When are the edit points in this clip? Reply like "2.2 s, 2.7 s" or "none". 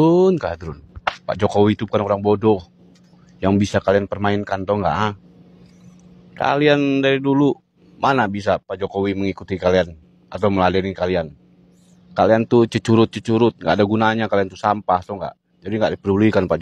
none